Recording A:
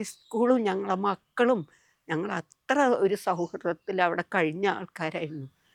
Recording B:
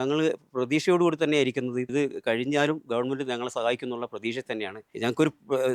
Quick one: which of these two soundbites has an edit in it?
B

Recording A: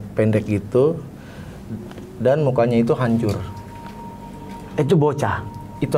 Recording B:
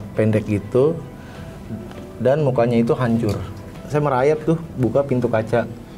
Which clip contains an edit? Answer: B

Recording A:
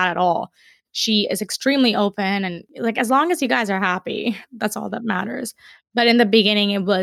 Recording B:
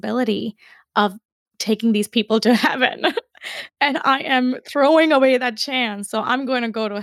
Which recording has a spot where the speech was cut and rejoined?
A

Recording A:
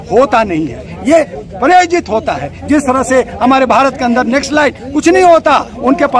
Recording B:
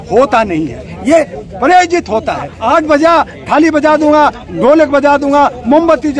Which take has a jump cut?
B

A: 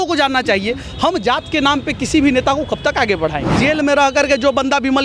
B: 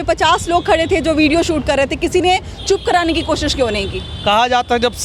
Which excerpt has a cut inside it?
A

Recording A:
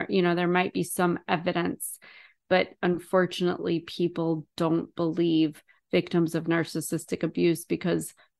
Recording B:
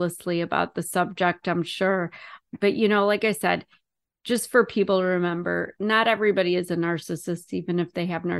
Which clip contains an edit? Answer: B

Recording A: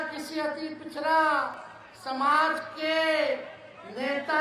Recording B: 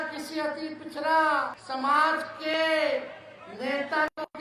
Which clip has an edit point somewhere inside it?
B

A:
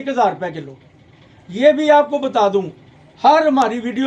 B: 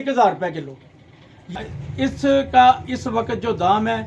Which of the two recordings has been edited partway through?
B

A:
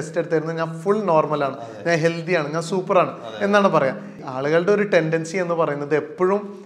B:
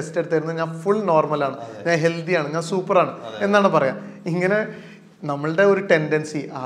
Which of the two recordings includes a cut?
A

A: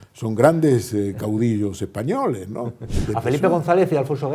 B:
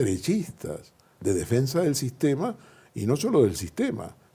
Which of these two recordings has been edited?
A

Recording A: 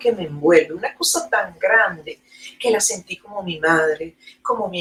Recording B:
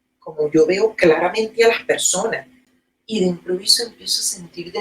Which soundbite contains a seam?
B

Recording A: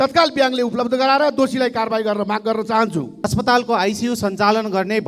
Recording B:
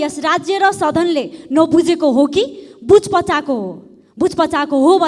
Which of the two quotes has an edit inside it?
A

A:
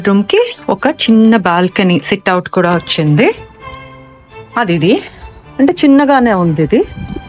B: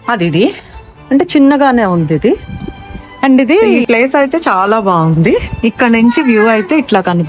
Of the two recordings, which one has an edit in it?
B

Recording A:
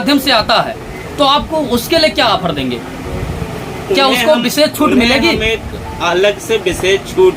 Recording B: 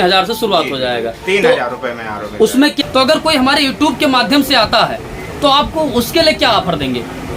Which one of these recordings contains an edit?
B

